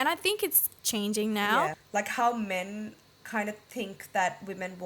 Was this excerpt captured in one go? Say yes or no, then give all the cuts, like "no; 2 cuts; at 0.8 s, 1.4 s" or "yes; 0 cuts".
no; 1 cut; at 1.8 s